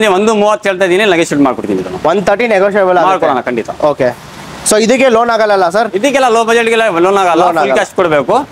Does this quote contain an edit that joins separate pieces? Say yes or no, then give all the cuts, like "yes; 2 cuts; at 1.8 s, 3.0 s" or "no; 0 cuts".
no; 0 cuts